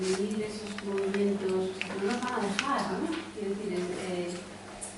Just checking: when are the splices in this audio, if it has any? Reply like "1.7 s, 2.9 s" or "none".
none